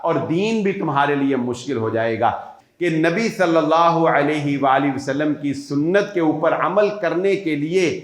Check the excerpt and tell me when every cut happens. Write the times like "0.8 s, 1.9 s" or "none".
2.5 s